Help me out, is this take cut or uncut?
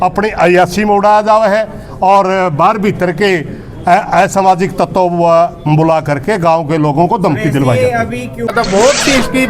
cut